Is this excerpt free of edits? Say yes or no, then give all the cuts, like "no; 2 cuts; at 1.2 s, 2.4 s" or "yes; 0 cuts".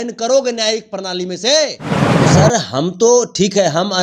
no; 1 cut; at 2.2 s